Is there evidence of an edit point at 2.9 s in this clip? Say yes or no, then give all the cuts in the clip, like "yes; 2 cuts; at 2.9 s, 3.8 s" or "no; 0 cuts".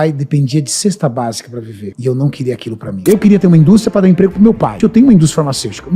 yes; 2 cuts; at 2.9 s, 4.8 s